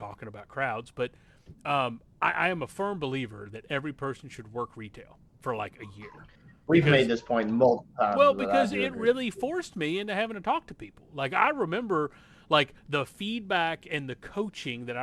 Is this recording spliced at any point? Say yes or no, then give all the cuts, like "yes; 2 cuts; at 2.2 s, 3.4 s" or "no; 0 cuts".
no; 0 cuts